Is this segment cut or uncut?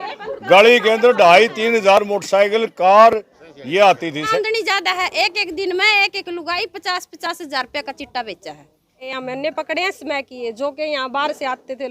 cut